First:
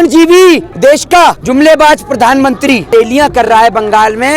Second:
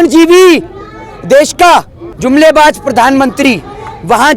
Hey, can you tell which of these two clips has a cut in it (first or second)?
first